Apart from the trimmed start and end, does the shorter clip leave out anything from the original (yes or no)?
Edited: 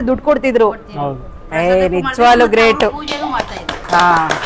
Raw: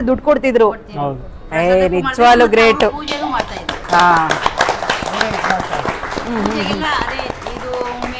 no